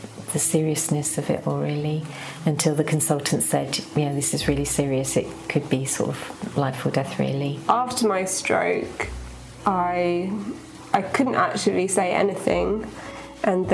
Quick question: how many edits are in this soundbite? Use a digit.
1